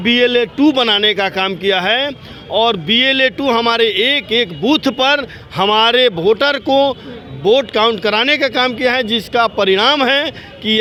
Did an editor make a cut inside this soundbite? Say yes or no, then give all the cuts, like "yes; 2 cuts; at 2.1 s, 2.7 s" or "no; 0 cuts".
no; 0 cuts